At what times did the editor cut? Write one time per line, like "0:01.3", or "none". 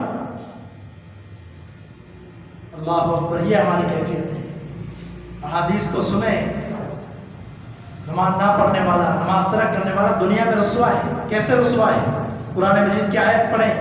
0:06.8